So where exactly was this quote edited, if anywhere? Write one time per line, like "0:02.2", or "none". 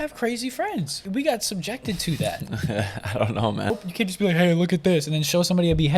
0:01.0
0:03.7